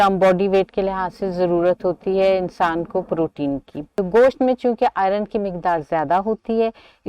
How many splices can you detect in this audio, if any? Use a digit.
1